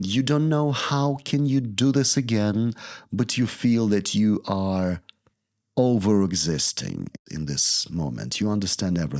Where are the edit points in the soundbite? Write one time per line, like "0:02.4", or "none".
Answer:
none

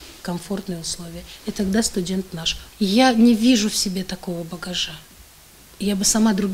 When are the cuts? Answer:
0:02.6

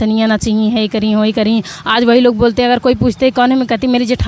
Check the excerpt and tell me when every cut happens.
none

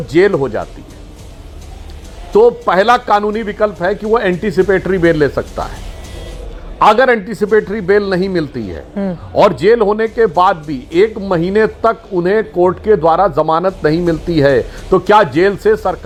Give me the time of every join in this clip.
none

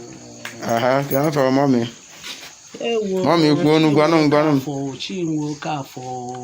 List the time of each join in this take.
0:01.7

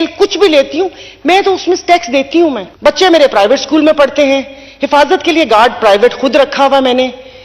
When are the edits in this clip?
0:02.7

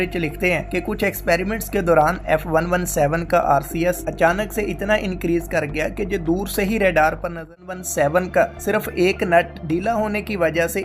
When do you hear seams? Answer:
0:07.8

